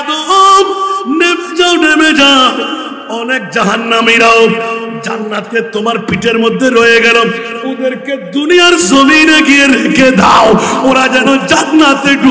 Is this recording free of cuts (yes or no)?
yes